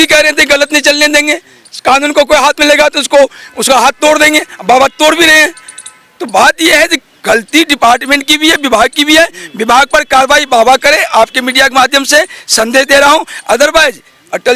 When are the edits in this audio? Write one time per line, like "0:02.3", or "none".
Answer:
none